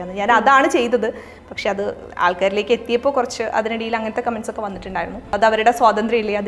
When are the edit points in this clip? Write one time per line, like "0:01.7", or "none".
0:05.3

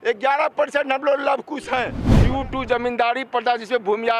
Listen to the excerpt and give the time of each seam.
0:02.1

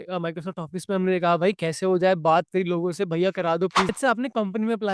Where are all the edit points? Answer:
0:03.9

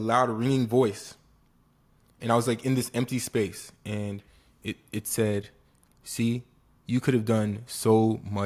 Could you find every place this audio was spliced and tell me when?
none

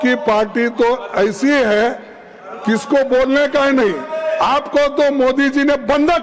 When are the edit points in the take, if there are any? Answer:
none

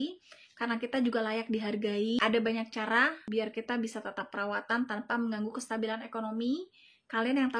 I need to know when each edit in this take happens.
0:02.2
0:03.2

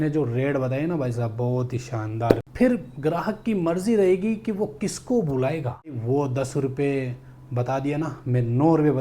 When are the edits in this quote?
0:02.4
0:06.0

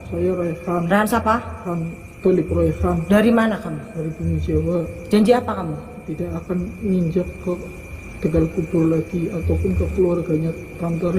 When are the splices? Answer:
0:01.6

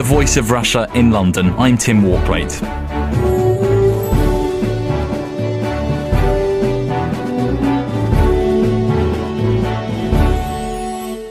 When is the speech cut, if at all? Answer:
0:04.7

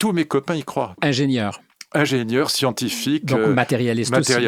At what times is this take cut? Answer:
0:01.0

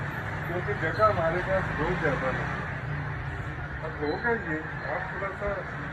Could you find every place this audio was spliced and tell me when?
none

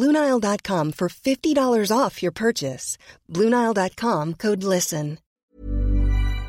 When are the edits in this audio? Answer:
0:05.2

